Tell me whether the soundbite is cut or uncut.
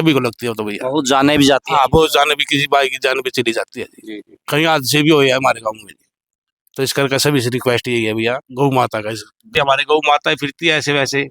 cut